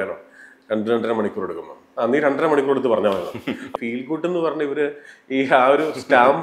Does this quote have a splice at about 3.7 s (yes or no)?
yes